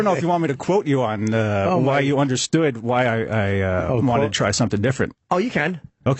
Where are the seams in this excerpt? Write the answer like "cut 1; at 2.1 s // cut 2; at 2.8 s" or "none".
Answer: none